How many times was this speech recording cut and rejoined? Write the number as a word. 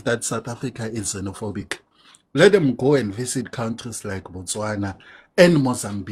zero